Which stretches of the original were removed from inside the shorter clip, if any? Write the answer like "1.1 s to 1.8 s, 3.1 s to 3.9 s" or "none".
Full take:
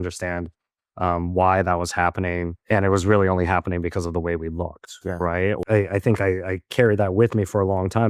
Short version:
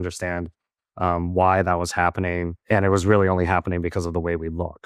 none